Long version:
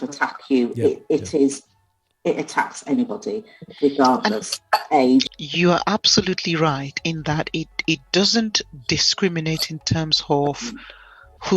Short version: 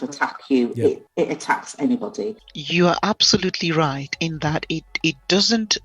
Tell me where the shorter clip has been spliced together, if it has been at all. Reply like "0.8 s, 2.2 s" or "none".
1.0 s, 2.5 s